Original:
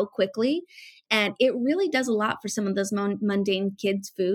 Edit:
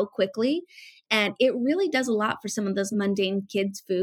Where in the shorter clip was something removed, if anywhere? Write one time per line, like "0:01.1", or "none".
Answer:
0:02.9